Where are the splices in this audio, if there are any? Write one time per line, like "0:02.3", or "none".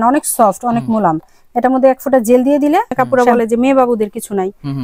0:02.9

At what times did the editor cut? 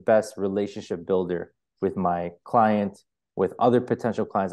none

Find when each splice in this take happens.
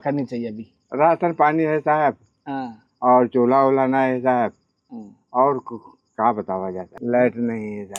none

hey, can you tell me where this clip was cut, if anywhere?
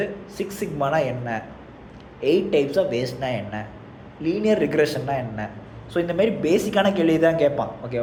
none

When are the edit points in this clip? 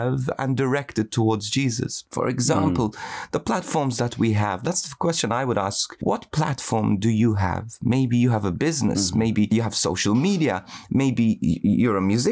0:02.0
0:04.7
0:05.9
0:09.5

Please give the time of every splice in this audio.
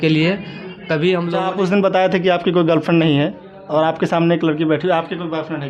0:01.3

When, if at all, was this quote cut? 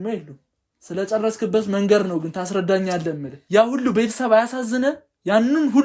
0:03.3

